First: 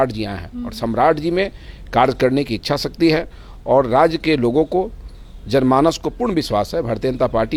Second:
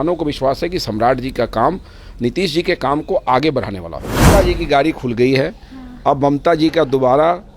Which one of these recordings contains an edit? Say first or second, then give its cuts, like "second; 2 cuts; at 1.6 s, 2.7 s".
second; 1 cut; at 4.3 s